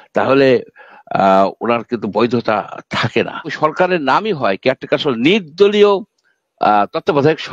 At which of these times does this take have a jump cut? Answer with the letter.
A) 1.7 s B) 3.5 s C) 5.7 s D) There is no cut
B